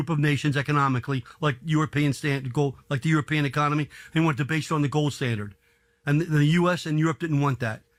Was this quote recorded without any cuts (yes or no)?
yes